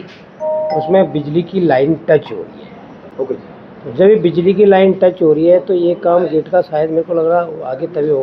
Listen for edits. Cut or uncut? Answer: uncut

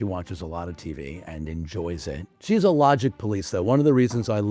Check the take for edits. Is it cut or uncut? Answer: cut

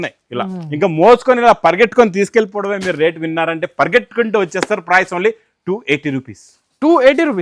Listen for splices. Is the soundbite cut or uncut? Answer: uncut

